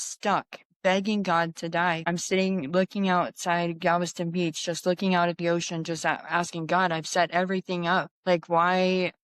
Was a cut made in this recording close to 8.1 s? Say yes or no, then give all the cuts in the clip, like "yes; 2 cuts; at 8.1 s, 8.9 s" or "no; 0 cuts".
yes; 2 cuts; at 2.0 s, 8.1 s